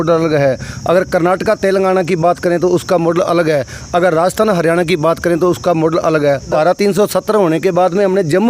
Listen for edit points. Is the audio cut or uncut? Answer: cut